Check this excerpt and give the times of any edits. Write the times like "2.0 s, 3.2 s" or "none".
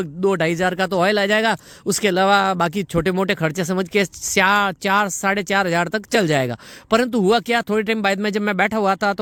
none